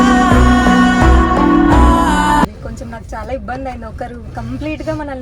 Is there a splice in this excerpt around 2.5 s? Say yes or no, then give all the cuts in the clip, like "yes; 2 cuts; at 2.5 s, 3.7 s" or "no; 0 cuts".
yes; 1 cut; at 2.5 s